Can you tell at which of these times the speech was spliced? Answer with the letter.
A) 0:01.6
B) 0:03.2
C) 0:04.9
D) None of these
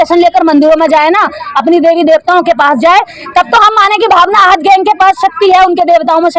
D